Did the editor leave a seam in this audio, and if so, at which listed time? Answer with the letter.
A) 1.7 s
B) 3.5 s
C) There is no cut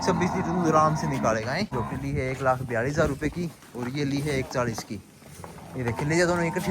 A